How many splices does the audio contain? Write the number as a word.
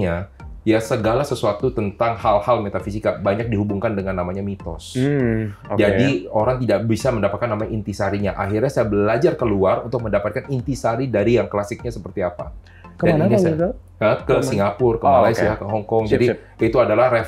zero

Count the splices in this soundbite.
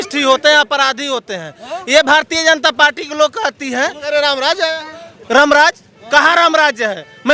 zero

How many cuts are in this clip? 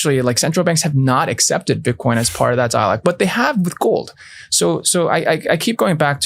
zero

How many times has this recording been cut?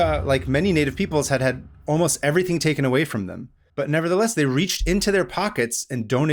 zero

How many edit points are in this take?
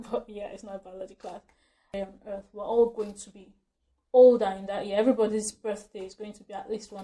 one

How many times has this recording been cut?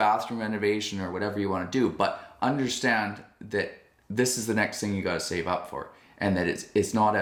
zero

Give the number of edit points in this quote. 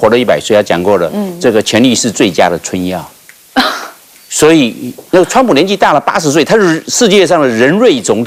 zero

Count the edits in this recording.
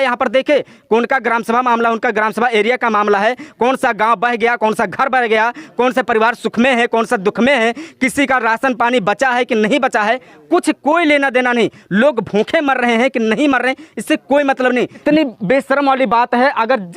one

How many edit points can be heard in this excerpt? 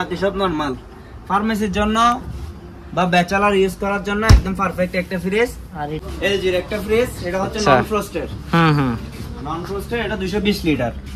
one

